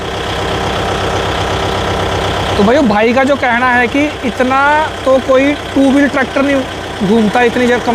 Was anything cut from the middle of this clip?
no; 0 cuts

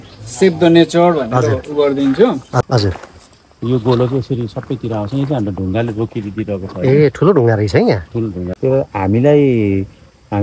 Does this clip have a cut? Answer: yes; 2 cuts; at 2.6 s, 8.4 s

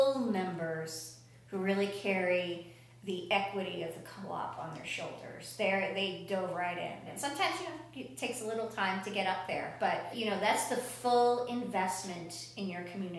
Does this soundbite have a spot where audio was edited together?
yes; 2 cuts; at 7.1 s, 10.2 s

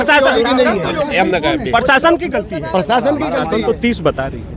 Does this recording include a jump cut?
yes; 1 cut; at 3.4 s

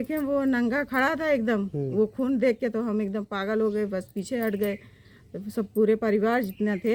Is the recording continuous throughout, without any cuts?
yes; 0 cuts

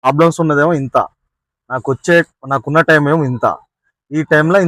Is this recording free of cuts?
yes; 0 cuts

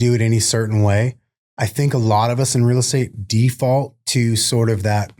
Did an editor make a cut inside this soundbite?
no; 0 cuts

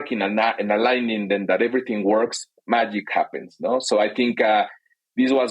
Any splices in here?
yes; 1 cut; at 2.6 s

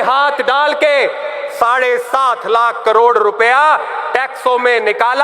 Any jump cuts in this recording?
no; 0 cuts

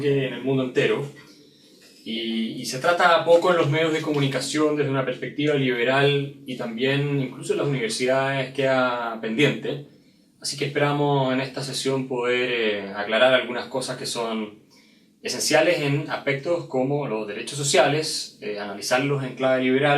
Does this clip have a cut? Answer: no; 0 cuts

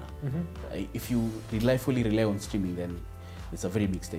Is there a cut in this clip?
no; 0 cuts

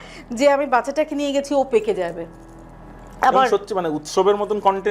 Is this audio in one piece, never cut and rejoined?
yes; 0 cuts

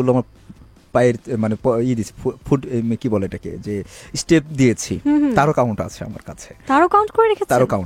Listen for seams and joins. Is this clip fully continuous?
yes; 0 cuts

